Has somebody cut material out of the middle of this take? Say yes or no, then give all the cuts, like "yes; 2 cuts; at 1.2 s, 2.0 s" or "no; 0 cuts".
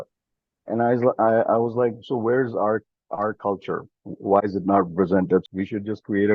yes; 1 cut; at 5.4 s